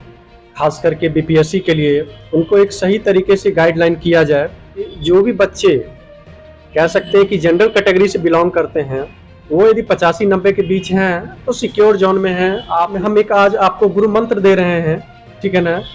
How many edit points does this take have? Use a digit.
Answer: 2